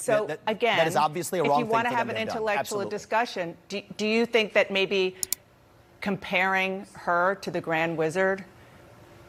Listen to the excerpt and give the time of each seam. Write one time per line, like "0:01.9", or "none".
none